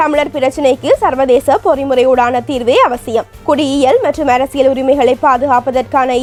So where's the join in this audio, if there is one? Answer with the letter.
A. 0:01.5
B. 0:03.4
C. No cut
C